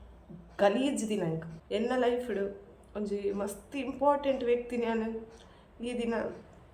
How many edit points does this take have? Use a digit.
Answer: 1